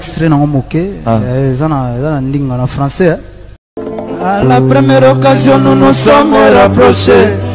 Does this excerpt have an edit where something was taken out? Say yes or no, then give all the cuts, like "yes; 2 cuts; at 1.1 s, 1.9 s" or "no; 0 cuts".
yes; 1 cut; at 3.9 s